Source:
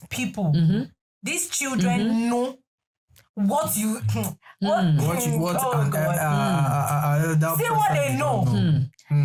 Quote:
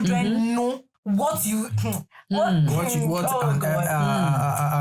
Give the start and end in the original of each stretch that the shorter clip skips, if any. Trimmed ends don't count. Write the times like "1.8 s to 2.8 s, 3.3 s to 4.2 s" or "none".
2.6 s to 3.2 s